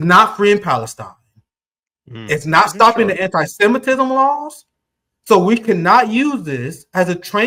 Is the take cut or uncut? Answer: uncut